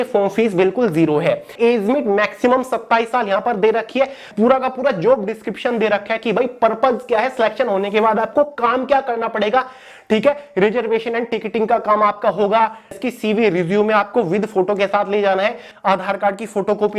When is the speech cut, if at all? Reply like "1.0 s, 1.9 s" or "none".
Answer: 1.5 s, 4.3 s, 12.9 s, 15.7 s